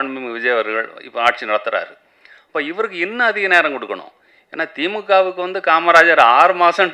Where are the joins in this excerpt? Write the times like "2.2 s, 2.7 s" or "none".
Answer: none